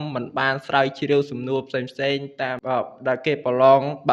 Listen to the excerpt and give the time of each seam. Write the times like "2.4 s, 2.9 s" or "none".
2.6 s